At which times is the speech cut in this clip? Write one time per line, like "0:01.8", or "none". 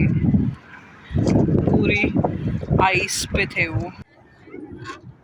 0:04.0